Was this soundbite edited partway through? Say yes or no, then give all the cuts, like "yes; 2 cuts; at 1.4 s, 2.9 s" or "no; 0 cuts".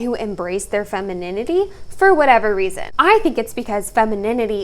yes; 1 cut; at 2.8 s